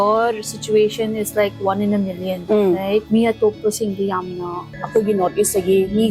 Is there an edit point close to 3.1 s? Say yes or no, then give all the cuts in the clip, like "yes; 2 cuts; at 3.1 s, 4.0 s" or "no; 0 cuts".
yes; 3 cuts; at 2.3 s, 3.1 s, 4.7 s